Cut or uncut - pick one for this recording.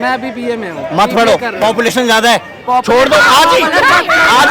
uncut